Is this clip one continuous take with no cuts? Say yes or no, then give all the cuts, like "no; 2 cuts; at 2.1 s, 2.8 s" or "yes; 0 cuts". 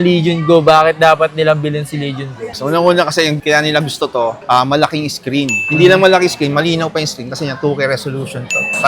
yes; 0 cuts